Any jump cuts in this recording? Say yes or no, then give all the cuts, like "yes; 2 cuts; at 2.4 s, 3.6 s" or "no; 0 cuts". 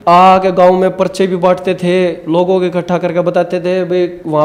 no; 0 cuts